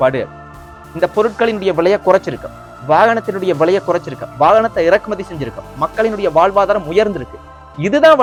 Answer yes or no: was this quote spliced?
no